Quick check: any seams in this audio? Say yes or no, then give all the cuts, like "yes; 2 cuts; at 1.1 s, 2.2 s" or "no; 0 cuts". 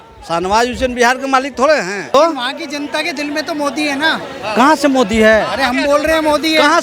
yes; 1 cut; at 2.1 s